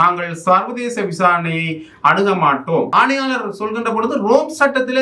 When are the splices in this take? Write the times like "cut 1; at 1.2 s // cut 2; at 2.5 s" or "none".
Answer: cut 1; at 2.9 s